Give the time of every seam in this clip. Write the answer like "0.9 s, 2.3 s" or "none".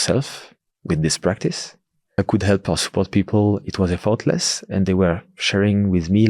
2.2 s